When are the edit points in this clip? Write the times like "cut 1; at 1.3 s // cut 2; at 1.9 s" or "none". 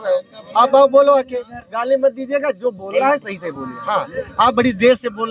none